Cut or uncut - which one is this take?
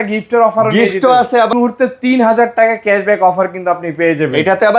cut